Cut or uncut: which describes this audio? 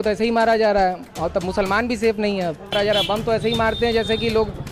cut